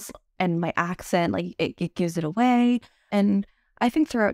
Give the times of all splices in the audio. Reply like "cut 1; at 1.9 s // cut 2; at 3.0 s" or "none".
cut 1; at 3.1 s